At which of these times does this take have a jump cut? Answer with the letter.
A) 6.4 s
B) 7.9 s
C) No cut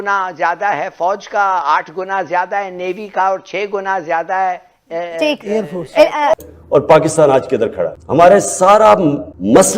A